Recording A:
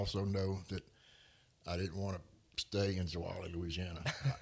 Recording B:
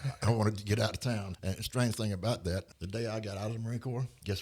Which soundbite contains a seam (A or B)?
B